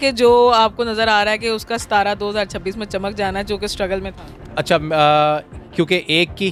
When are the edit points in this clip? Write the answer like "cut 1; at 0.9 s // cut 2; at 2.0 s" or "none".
none